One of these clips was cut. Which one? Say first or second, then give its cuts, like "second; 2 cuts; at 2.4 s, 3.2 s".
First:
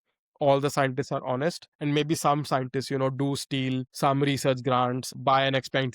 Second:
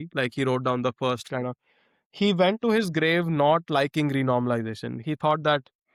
first; 3 cuts; at 1.7 s, 3.9 s, 5.1 s